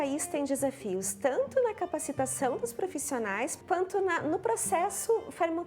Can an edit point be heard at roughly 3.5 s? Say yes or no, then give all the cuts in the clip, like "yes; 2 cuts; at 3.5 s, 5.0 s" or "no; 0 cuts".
yes; 1 cut; at 3.5 s